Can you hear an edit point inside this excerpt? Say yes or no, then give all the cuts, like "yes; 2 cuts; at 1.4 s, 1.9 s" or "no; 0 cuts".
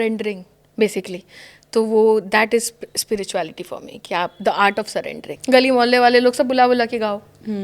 yes; 1 cut; at 5.3 s